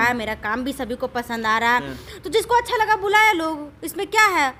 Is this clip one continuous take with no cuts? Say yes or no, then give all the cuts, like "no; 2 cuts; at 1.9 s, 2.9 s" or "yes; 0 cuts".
yes; 0 cuts